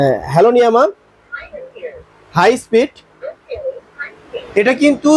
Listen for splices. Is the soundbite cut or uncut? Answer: uncut